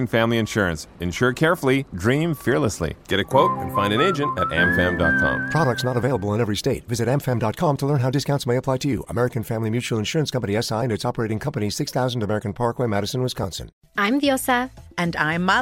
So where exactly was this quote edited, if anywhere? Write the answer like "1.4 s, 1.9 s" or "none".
13.7 s